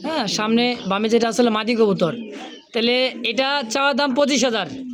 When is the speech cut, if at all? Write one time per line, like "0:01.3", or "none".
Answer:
none